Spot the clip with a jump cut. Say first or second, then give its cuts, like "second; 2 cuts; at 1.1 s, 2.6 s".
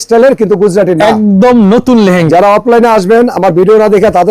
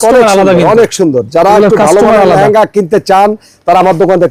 first; 1 cut; at 2.3 s